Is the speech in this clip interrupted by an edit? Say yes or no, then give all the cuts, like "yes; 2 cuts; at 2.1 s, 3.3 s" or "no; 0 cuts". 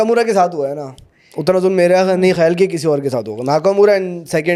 no; 0 cuts